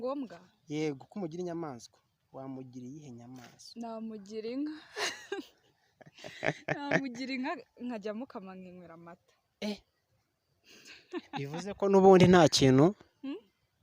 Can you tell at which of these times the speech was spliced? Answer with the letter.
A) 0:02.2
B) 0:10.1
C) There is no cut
C